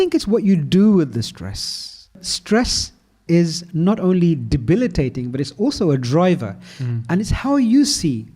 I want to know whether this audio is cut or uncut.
cut